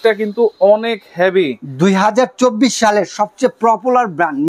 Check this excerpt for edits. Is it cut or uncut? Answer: uncut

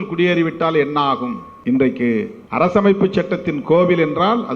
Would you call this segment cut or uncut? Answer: cut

